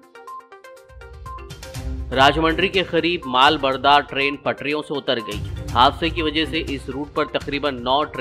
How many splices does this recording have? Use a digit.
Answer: 1